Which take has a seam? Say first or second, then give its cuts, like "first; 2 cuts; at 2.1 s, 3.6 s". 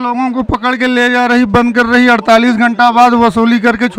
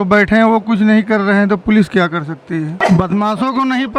second; 1 cut; at 2.8 s